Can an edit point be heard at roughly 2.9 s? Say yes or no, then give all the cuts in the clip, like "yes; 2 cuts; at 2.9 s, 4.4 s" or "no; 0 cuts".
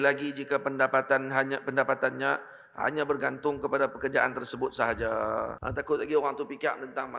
no; 1 cut; at 5.6 s